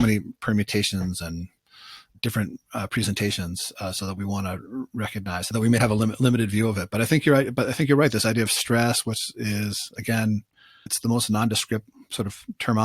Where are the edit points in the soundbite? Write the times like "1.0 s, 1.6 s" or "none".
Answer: 5.5 s, 10.9 s